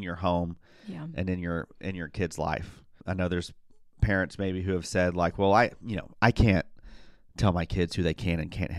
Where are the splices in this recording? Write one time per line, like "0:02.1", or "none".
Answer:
0:03.0